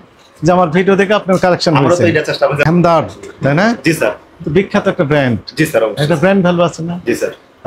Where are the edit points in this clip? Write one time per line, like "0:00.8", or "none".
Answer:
0:02.6